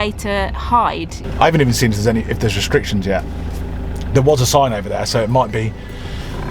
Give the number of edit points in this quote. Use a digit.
1